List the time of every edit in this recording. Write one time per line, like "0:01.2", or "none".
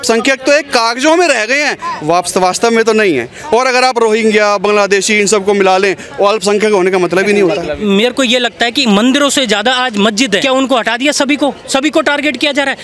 0:07.8
0:10.4